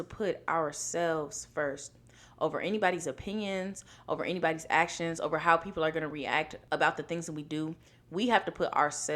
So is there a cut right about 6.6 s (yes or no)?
yes